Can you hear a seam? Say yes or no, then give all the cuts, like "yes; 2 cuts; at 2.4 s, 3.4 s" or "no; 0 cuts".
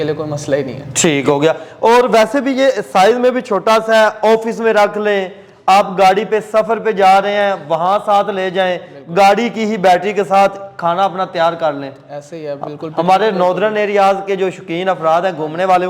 no; 0 cuts